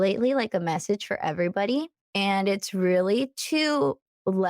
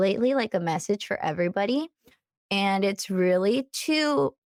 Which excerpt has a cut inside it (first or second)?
first